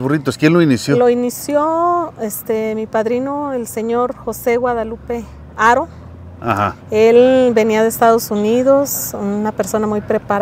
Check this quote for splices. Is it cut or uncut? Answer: uncut